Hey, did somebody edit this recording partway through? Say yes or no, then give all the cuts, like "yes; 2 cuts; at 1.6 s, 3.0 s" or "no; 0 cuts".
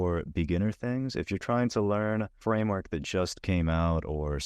yes; 1 cut; at 2.3 s